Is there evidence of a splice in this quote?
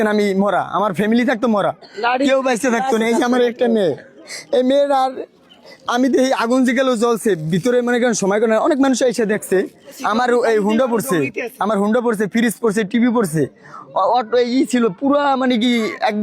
yes; 1 cut; at 10.0 s

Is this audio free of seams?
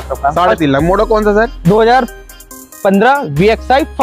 yes; 0 cuts

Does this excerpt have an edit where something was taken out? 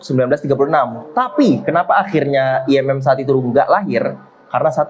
no; 0 cuts

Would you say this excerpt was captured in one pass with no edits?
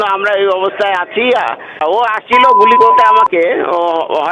no; 1 cut; at 1.8 s

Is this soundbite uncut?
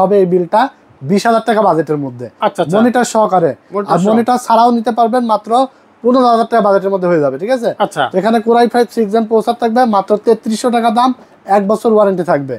yes; 0 cuts

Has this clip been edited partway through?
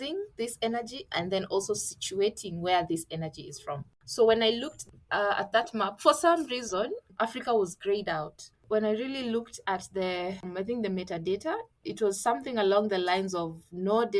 yes; 5 cuts; at 3.9 s, 7.0 s, 8.6 s, 10.5 s, 11.8 s

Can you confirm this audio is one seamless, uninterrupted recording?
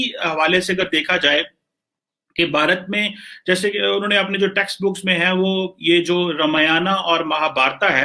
yes; 0 cuts

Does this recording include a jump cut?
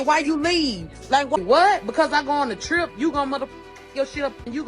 yes; 1 cut; at 1.4 s

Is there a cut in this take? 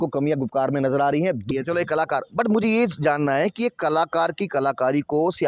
yes; 1 cut; at 1.5 s

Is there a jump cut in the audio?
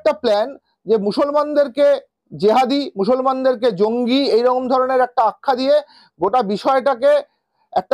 no; 0 cuts

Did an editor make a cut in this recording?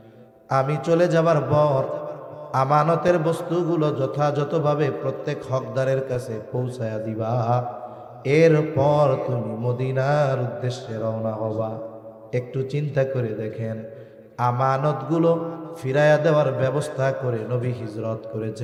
no; 0 cuts

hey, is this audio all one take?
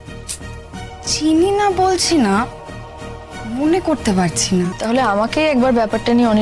no; 1 cut; at 4.7 s

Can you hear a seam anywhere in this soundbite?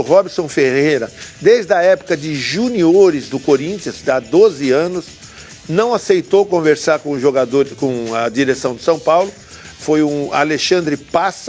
yes; 1 cut; at 9.6 s

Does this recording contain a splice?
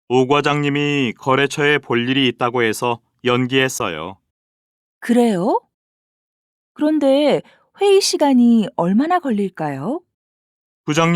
yes; 1 cut; at 3.3 s

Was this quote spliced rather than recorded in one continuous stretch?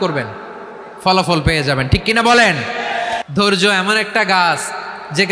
yes; 1 cut; at 3.2 s

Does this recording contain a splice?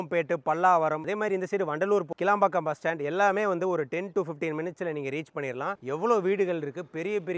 yes; 3 cuts; at 1.0 s, 2.1 s, 5.8 s

